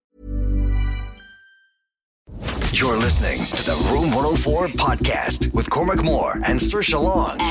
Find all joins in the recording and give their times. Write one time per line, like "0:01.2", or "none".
0:02.5